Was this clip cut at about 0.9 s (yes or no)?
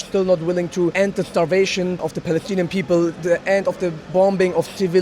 yes